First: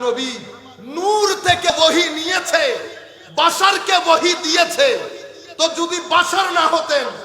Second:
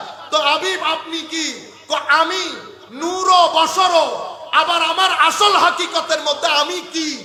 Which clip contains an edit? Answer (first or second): first